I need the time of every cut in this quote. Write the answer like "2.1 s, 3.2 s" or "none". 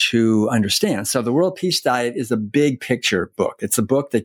none